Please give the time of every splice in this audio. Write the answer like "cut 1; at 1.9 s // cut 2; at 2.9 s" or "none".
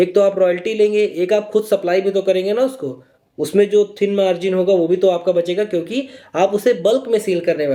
none